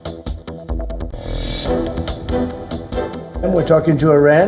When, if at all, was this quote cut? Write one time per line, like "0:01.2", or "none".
0:01.2
0:03.5